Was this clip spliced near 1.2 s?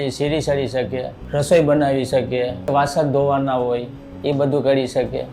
yes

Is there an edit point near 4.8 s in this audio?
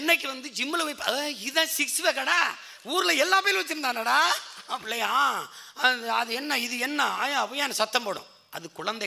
yes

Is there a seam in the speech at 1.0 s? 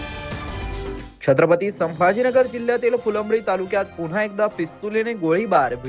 yes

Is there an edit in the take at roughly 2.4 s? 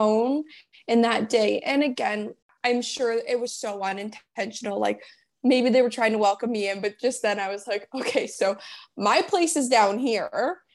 yes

